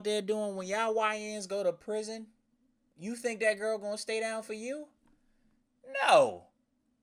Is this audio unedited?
yes; 0 cuts

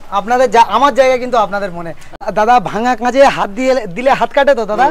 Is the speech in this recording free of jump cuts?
no; 1 cut; at 2.3 s

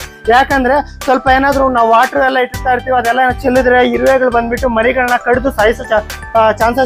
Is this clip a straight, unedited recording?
yes; 0 cuts

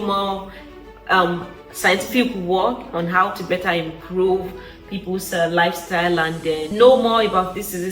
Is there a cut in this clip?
yes; 1 cut; at 6.7 s

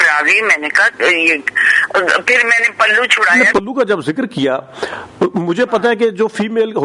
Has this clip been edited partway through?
yes; 1 cut; at 3.3 s

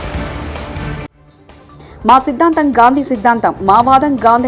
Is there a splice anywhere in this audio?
yes; 1 cut; at 1.3 s

